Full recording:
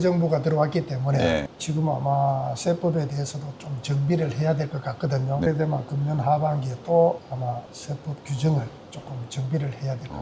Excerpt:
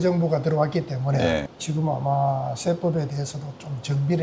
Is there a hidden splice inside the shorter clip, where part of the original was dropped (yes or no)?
no